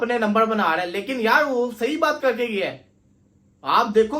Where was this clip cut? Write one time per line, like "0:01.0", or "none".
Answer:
none